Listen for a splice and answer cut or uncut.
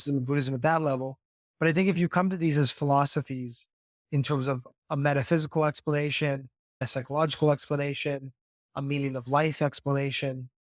cut